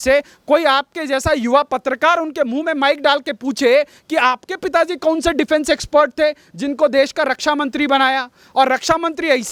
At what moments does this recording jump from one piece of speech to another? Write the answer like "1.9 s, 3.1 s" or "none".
none